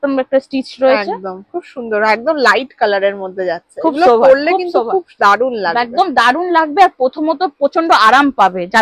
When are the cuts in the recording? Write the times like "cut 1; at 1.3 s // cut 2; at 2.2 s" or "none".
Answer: none